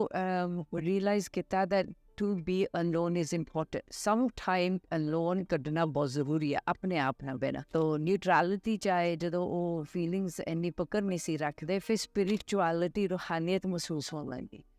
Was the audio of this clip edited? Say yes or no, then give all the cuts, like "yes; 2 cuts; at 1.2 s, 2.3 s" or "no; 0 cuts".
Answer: yes; 1 cut; at 7.7 s